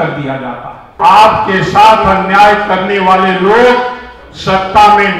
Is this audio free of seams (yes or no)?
no